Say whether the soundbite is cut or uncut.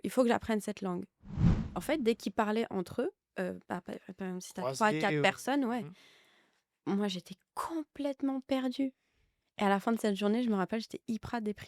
cut